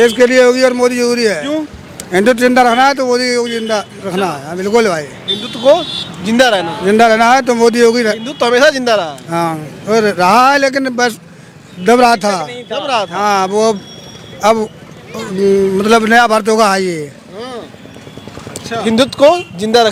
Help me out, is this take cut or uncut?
uncut